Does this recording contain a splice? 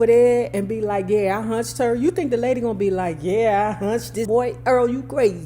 yes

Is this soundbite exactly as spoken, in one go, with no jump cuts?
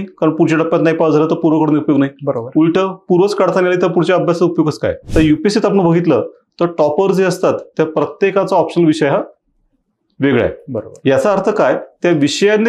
no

